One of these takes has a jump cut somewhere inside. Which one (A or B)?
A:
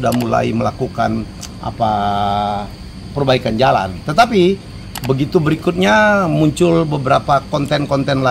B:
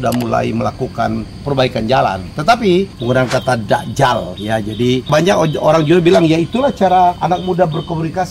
B